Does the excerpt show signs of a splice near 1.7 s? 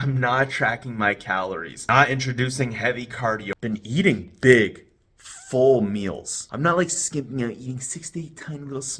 yes; 2 cuts; at 1.7 s, 3.5 s

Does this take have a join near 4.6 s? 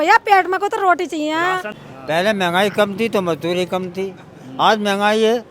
no; 1 cut; at 1.7 s

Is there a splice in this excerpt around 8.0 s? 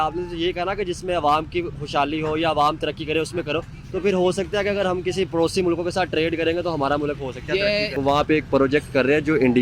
yes; 1 cut; at 8.0 s

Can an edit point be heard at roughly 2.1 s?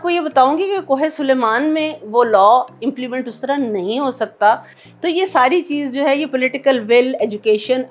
no; 1 cut; at 4.7 s

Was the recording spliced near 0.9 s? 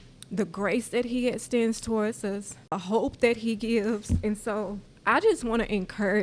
no; 2 cuts; at 2.7 s, 4.9 s

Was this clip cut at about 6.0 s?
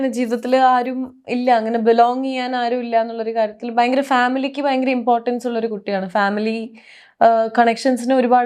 no; 0 cuts

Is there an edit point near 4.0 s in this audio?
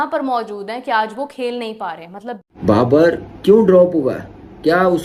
no; 1 cut; at 2.3 s

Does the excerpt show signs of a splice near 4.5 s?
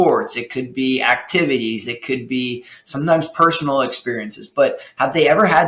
no; 0 cuts

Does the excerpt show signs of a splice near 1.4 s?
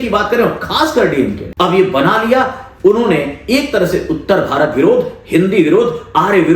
yes; 1 cut; at 1.4 s

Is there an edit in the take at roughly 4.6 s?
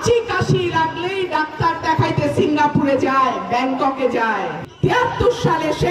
yes; 1 cut; at 4.6 s

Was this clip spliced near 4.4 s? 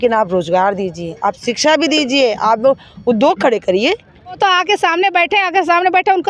yes; 1 cut; at 4.4 s

